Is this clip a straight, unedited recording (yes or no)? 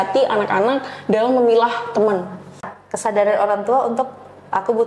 no